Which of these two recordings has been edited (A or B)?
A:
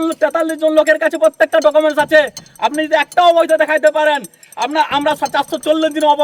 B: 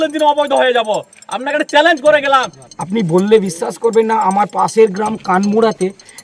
B